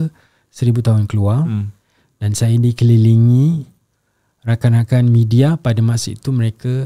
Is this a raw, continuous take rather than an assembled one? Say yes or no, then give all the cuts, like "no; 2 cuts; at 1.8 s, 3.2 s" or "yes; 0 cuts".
yes; 0 cuts